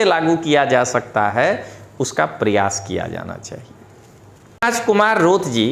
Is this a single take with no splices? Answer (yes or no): no